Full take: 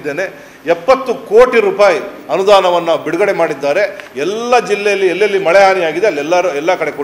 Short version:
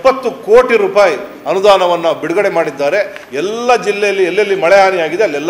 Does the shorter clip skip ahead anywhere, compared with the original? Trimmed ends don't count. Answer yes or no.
no